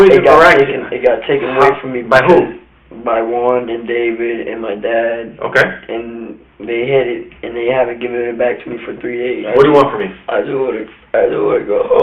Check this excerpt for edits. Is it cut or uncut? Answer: cut